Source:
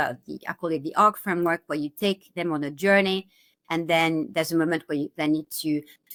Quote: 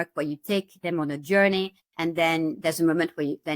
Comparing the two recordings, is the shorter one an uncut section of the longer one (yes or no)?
no